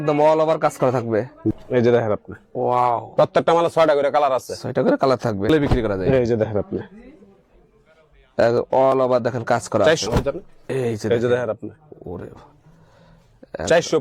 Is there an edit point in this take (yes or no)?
yes